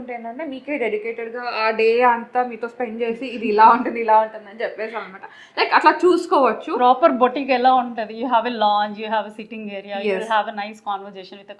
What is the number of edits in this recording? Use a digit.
0